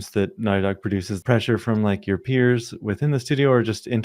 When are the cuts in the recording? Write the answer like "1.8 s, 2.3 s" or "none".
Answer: 1.2 s